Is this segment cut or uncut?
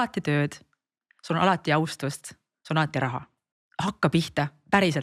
cut